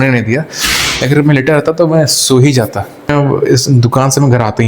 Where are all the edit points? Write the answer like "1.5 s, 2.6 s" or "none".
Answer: 3.1 s